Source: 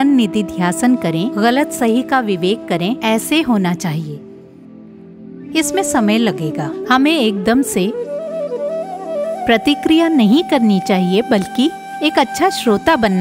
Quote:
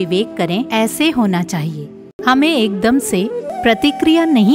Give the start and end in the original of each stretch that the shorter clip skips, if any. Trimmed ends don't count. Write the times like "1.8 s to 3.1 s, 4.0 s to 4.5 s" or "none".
4.4 s to 6.7 s, 8.1 s to 9.3 s